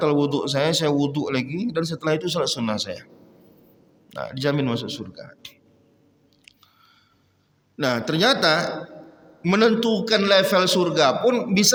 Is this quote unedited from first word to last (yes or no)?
yes